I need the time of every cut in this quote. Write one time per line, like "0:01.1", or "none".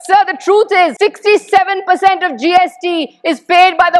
0:00.9